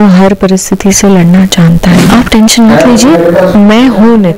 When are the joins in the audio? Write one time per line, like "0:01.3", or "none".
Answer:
0:02.0